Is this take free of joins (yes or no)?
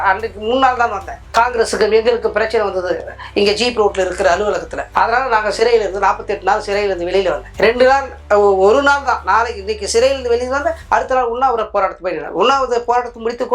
yes